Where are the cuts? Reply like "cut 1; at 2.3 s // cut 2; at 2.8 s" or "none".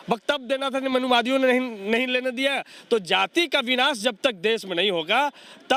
none